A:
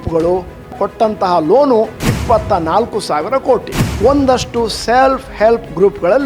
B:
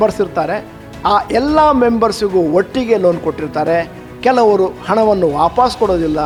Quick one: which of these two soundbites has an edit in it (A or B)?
A